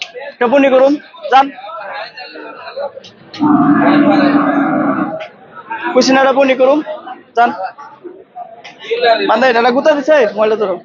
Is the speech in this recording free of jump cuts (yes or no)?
yes